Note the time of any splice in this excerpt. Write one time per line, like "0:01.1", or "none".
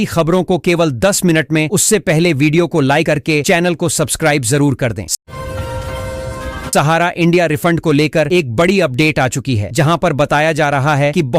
0:05.0
0:06.6